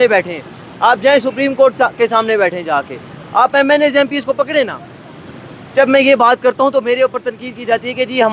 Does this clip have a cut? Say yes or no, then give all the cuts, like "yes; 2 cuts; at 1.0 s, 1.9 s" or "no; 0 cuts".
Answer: no; 0 cuts